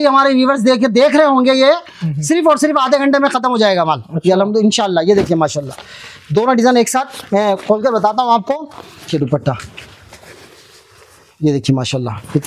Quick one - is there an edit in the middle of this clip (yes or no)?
yes